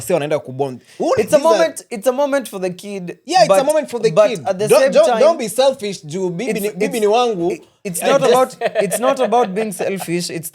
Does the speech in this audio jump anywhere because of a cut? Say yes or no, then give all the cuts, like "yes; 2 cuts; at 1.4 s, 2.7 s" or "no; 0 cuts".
no; 0 cuts